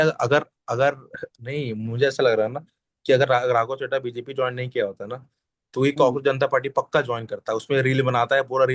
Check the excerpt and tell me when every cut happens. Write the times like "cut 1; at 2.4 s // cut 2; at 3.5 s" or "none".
none